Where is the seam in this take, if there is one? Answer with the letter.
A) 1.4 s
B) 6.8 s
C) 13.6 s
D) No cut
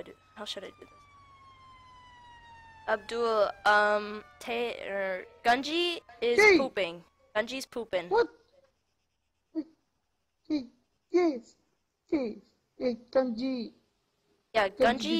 A